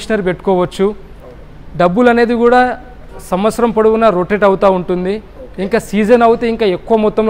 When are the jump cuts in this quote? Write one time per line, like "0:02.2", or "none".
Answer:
none